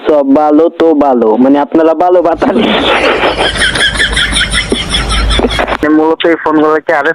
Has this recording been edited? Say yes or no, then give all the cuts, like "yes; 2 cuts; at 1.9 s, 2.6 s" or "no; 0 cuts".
yes; 1 cut; at 5.8 s